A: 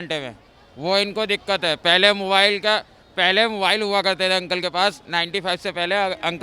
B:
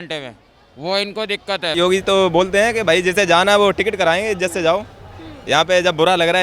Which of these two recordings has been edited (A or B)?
B